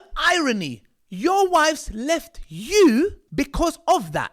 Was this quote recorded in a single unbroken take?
no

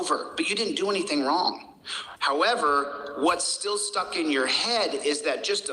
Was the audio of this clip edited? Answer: yes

